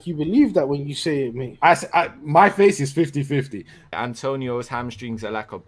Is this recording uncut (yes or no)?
no